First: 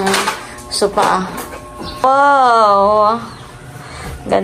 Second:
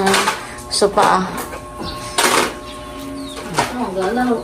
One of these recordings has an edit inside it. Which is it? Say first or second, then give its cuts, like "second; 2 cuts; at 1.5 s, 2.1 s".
first; 1 cut; at 2.0 s